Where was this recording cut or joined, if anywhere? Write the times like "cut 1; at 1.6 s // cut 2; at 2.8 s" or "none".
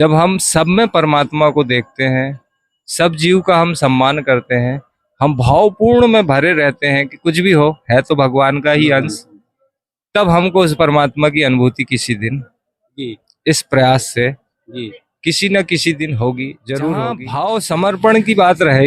cut 1; at 17.3 s